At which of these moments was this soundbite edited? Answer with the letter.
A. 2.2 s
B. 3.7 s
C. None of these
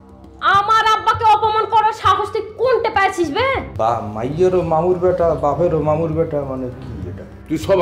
B